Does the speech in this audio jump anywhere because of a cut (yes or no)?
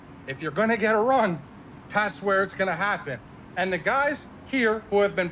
no